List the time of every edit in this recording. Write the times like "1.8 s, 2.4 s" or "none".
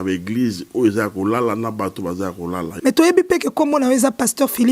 2.6 s